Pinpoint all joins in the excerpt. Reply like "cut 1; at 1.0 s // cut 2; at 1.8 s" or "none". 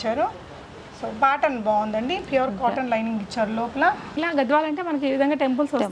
cut 1; at 4.2 s